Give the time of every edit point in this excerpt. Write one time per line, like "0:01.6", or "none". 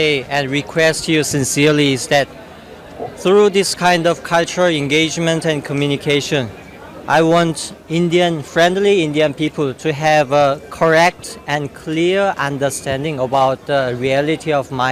none